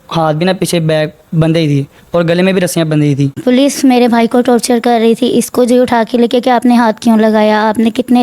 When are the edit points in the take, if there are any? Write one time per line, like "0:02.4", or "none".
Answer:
0:03.4